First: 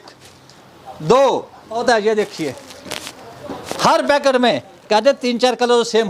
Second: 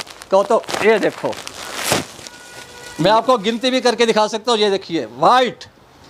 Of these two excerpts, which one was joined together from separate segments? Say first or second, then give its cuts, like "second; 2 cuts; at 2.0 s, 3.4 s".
first; 1 cut; at 1.8 s